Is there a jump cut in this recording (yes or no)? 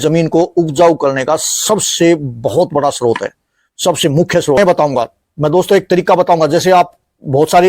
yes